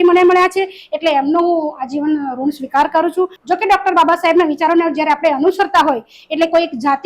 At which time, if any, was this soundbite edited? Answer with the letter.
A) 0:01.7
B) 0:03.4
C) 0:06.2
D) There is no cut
B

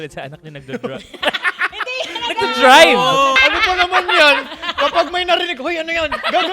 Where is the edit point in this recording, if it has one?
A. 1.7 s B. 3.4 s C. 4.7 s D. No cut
B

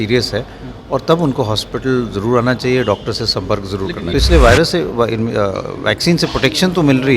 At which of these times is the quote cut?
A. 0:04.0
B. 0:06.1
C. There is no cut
A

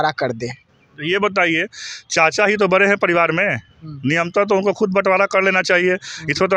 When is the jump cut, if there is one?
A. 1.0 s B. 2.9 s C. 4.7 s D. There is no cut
D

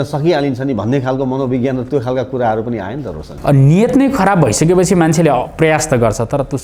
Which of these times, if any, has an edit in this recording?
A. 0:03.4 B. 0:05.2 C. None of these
C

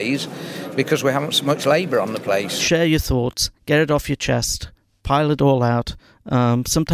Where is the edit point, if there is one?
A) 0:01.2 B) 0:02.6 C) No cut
B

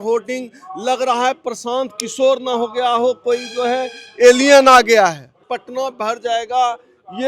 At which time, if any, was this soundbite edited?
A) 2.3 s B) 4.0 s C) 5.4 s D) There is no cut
C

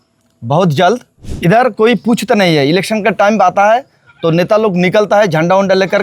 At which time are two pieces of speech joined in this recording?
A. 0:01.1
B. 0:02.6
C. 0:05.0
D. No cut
A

